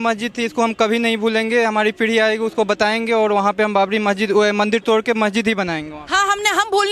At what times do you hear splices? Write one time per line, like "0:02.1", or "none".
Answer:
none